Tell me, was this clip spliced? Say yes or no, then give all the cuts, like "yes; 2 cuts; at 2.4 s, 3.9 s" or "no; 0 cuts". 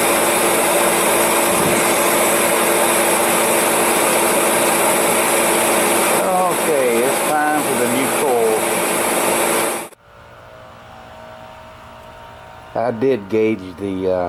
no; 0 cuts